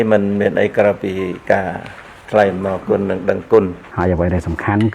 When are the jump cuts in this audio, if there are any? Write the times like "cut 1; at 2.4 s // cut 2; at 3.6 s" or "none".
cut 1; at 3.8 s